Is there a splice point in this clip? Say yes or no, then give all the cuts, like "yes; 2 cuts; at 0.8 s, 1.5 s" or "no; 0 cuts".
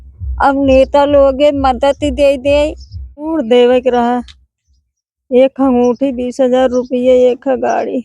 yes; 1 cut; at 3.3 s